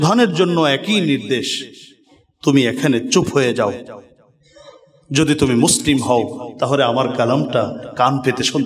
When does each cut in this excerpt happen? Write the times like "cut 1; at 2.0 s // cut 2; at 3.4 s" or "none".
none